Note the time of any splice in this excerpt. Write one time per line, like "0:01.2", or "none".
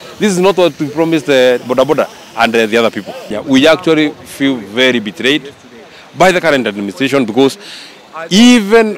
0:03.4